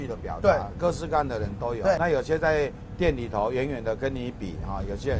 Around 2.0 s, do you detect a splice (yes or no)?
yes